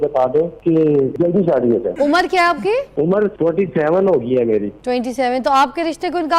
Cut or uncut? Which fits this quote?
cut